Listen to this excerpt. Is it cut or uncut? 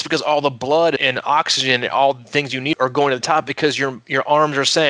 cut